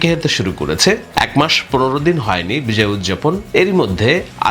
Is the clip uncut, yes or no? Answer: no